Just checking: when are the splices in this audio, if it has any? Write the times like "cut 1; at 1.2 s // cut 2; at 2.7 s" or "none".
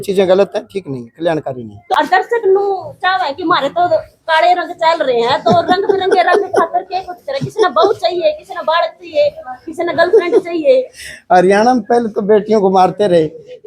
cut 1; at 1.7 s